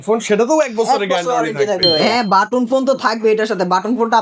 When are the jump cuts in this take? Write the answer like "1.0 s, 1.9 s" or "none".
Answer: 2.0 s